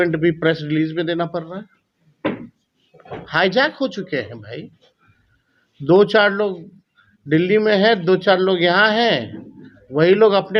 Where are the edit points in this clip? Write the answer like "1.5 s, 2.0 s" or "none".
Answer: none